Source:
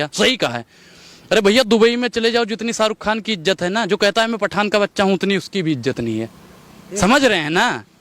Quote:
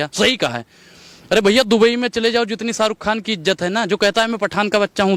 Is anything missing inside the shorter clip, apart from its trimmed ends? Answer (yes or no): no